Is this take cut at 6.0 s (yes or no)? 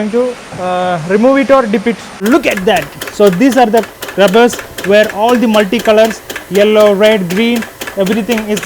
no